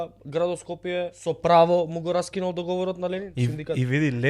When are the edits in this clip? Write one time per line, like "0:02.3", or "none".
0:01.2
0:03.3